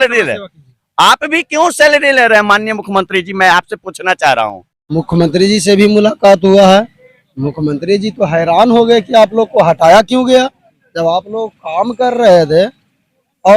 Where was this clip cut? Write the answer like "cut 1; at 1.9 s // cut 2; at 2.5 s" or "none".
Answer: cut 1; at 4.7 s